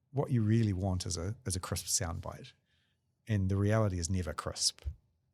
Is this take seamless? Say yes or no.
no